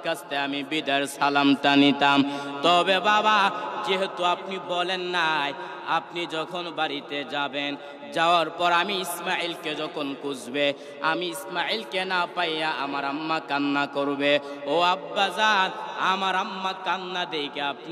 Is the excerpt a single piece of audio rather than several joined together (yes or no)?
yes